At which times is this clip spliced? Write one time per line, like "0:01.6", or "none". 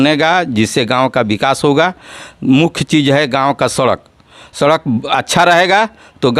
none